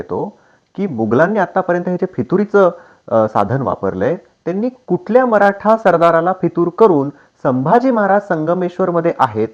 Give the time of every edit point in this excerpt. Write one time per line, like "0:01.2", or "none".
none